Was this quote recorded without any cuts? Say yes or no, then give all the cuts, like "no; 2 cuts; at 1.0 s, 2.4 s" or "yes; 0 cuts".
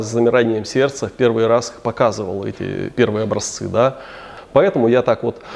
no; 1 cut; at 4.3 s